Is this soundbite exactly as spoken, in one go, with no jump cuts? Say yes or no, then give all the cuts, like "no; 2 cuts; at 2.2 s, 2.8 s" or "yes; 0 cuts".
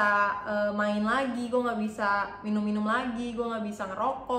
yes; 0 cuts